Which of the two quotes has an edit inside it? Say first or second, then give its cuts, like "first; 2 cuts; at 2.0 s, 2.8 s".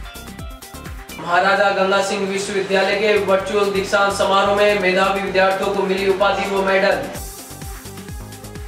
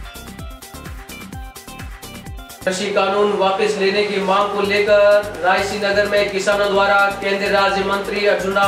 second; 1 cut; at 0.9 s